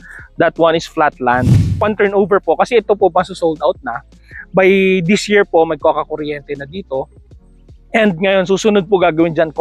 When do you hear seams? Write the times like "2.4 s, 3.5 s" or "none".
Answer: 1.6 s